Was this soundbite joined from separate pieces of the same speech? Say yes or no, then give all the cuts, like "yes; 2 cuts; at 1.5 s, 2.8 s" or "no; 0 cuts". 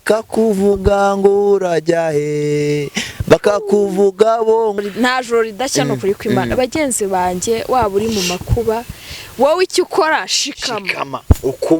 yes; 1 cut; at 4.8 s